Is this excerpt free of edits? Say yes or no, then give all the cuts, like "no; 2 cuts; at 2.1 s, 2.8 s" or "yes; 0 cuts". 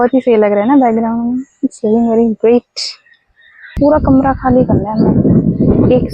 no; 1 cut; at 3.8 s